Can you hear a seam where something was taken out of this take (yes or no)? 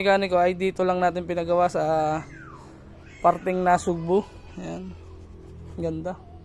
no